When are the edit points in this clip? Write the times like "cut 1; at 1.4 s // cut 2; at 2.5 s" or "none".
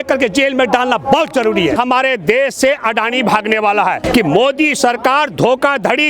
cut 1; at 1.7 s // cut 2; at 4.0 s